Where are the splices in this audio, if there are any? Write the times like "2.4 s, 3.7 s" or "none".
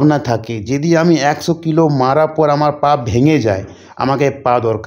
none

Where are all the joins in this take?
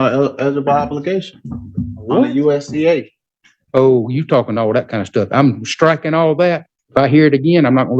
6.7 s

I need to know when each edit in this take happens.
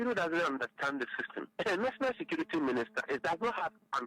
1.4 s, 3.2 s

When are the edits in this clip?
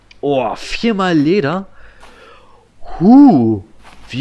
none

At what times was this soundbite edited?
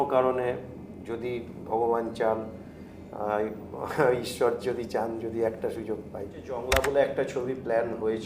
6.5 s

